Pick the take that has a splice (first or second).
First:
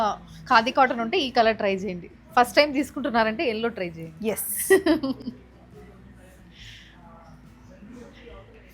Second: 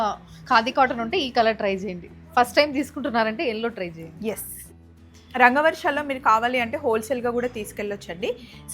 second